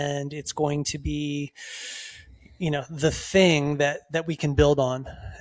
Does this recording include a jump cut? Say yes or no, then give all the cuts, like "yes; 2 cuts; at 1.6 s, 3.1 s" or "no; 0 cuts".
no; 0 cuts